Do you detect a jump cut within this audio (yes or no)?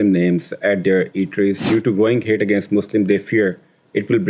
yes